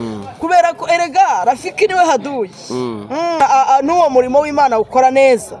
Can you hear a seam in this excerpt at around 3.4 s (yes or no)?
yes